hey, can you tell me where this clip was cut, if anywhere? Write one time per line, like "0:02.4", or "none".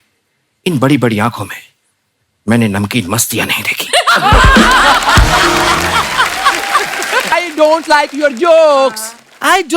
0:07.3

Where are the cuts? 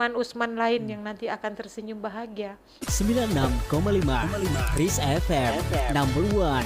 0:03.0

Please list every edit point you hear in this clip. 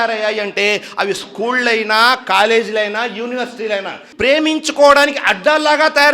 0:04.0

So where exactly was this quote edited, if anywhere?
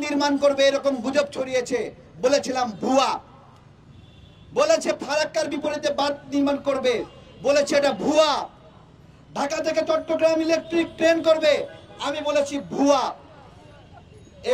none

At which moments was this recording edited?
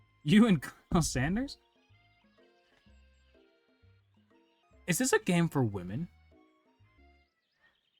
0:04.6
0:07.0

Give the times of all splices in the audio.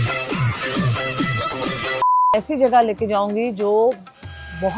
0:02.3

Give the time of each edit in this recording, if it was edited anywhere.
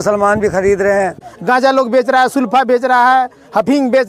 0:01.3

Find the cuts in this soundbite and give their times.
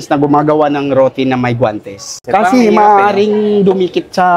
0:02.2

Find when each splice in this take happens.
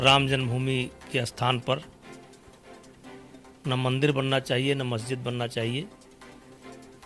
0:01.9
0:03.6

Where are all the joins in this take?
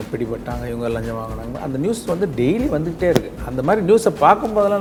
none

